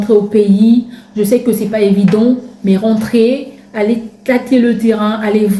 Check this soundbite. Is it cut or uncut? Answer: uncut